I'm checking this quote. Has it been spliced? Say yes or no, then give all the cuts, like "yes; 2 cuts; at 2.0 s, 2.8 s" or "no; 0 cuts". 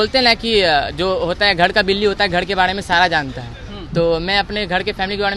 no; 0 cuts